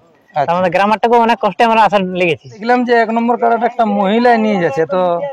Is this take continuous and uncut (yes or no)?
no